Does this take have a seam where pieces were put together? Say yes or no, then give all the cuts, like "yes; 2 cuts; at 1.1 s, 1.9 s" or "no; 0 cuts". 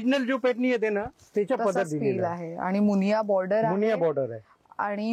no; 0 cuts